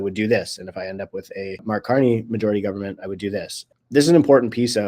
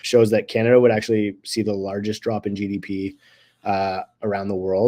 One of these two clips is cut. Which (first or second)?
first